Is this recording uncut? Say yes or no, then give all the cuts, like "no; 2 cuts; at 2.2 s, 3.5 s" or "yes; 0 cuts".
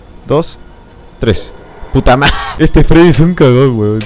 no; 1 cut; at 2.4 s